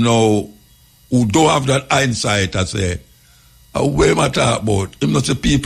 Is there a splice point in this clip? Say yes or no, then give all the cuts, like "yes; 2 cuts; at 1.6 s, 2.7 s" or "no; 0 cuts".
no; 0 cuts